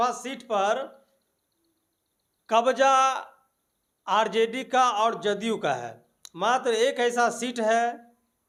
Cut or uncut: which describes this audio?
uncut